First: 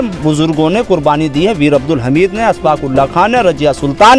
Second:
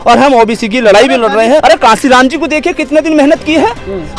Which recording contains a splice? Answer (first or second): second